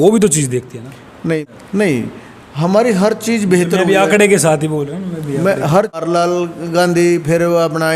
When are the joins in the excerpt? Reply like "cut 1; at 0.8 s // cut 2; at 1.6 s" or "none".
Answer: cut 1; at 1.4 s // cut 2; at 6.0 s